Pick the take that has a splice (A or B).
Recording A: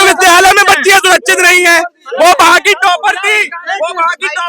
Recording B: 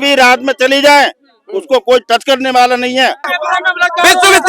B